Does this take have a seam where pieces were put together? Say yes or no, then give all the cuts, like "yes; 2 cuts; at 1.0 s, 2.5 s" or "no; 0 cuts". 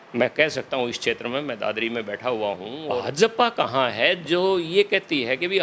yes; 1 cut; at 2.7 s